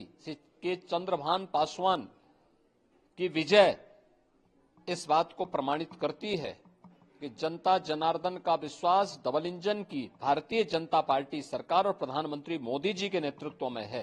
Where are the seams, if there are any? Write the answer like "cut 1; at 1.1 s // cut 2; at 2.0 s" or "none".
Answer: none